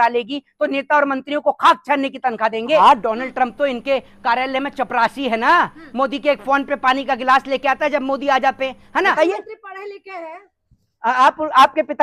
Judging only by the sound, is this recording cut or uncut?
cut